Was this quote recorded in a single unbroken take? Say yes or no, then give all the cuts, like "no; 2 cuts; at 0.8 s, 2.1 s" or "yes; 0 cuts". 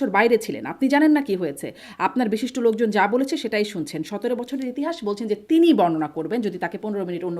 yes; 0 cuts